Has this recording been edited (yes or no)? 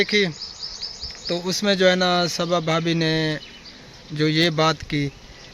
no